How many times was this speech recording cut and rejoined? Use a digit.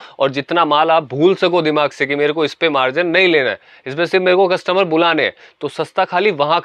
0